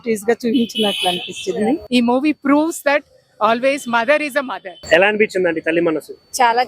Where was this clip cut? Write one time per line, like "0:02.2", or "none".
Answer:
0:01.8
0:04.8